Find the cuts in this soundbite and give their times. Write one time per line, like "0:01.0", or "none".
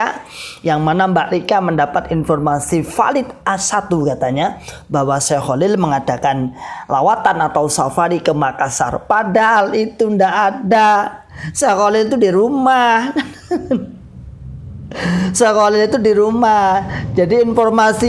none